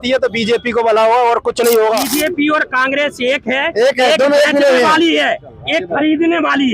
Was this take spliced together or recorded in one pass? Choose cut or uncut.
cut